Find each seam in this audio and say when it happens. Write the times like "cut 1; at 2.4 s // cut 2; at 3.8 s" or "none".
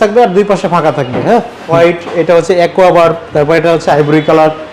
cut 1; at 1.7 s